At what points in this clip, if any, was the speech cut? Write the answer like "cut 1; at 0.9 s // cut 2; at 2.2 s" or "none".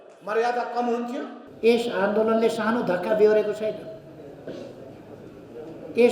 cut 1; at 1.4 s